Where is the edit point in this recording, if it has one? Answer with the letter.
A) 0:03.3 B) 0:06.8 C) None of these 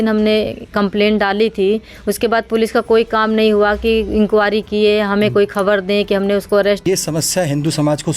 B